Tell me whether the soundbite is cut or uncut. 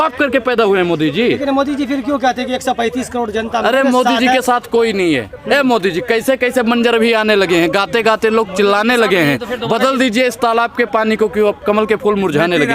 uncut